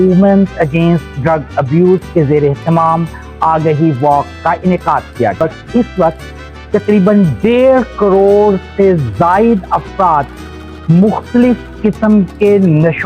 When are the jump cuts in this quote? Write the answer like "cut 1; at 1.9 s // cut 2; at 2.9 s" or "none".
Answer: cut 1; at 5.4 s